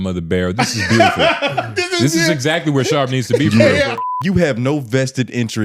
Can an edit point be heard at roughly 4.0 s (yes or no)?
yes